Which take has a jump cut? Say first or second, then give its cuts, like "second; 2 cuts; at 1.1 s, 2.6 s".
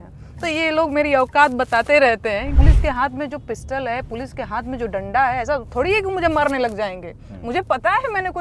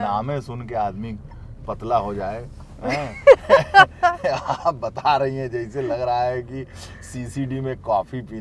first; 1 cut; at 2.6 s